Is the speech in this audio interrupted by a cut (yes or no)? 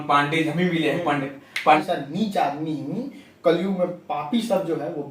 yes